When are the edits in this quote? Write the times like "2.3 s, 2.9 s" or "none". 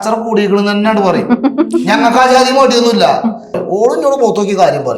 3.6 s